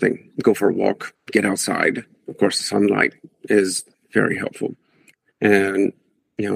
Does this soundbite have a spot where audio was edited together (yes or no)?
yes